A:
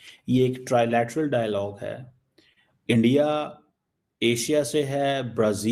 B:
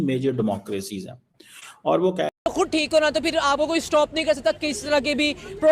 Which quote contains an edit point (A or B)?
B